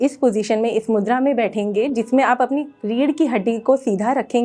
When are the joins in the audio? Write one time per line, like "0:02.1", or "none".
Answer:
none